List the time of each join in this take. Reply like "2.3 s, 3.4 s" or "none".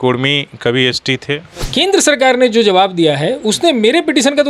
1.7 s